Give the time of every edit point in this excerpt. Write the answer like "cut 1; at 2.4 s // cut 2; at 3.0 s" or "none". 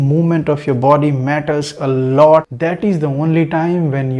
cut 1; at 2.5 s